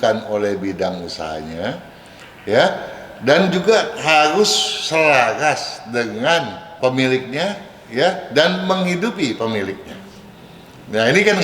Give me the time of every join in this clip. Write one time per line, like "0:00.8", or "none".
none